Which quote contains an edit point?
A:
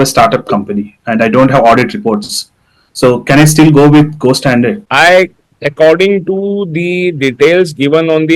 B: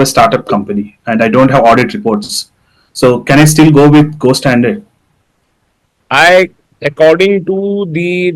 A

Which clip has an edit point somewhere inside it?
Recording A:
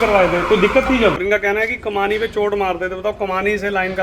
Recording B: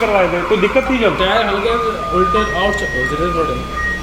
A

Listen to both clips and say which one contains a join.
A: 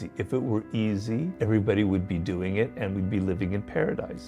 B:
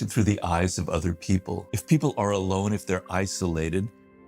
B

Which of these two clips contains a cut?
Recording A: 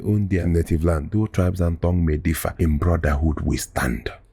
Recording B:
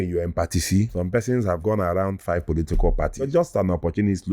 B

